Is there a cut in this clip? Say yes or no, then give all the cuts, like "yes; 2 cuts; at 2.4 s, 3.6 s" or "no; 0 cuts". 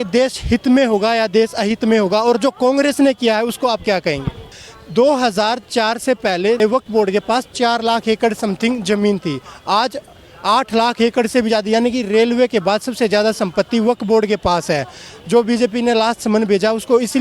yes; 1 cut; at 4.4 s